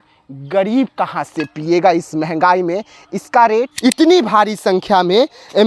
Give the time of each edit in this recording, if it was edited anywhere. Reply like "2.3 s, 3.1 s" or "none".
3.7 s